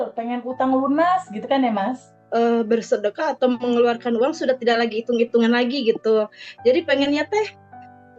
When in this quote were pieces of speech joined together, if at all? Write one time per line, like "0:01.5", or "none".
0:02.1